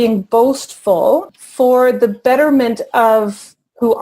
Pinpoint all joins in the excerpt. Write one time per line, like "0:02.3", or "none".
0:01.3